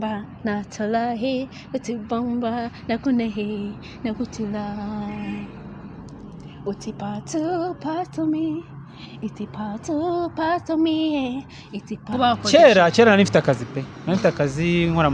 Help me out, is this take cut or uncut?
cut